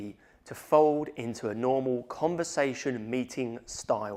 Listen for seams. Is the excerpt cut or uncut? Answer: uncut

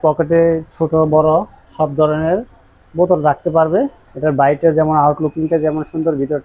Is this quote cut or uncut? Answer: cut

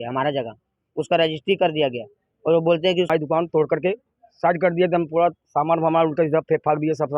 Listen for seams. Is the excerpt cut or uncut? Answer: cut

